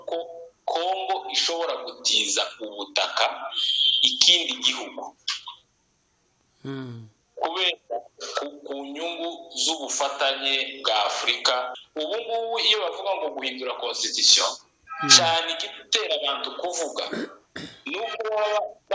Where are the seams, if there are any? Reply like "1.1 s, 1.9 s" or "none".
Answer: 11.8 s